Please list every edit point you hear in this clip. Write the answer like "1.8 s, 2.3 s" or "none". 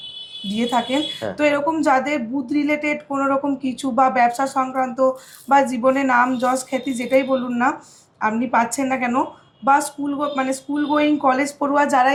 none